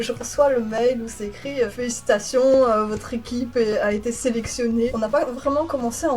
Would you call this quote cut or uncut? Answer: cut